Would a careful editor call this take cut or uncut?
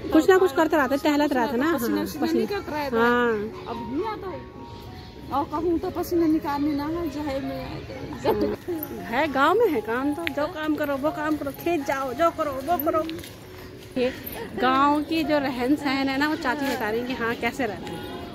cut